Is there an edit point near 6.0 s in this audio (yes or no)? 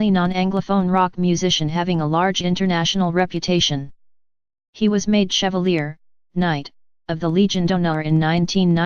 no